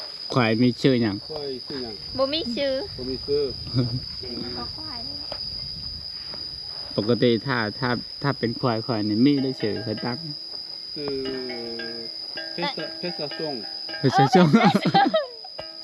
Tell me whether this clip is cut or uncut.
uncut